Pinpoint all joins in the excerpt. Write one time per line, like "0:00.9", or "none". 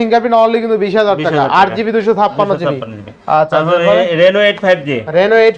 none

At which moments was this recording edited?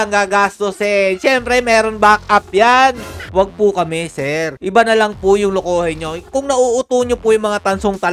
0:03.2

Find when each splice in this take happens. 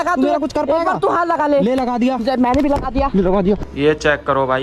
0:03.6

